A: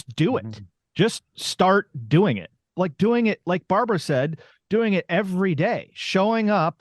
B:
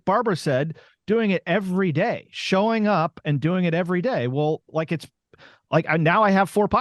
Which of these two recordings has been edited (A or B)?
A